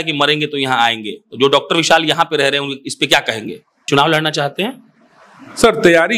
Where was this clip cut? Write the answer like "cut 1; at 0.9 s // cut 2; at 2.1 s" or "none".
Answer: cut 1; at 3.9 s